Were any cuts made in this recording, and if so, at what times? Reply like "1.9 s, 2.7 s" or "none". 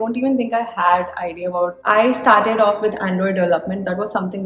1.8 s